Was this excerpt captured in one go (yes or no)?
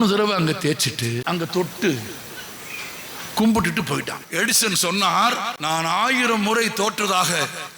no